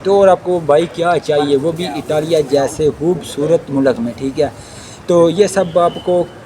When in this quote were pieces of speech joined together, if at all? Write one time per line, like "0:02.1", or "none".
0:02.9

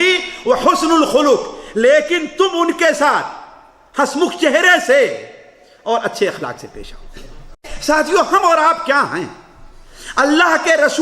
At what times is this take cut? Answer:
0:07.7

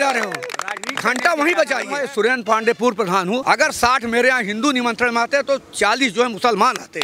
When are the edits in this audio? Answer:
0:02.0
0:03.4

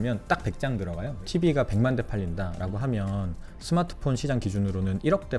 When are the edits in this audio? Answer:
0:01.2

